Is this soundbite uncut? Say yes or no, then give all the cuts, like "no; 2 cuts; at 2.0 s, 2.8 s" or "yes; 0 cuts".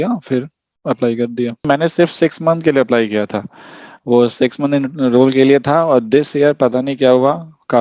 no; 1 cut; at 1.7 s